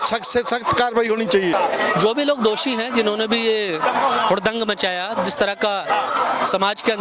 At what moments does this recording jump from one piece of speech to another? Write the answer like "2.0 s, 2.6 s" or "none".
1.5 s